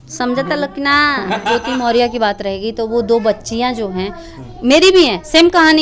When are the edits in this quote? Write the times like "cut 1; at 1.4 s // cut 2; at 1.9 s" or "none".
cut 1; at 1.5 s